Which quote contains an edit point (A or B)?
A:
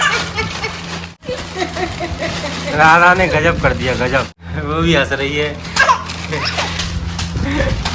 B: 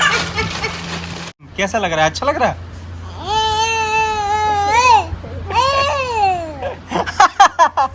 B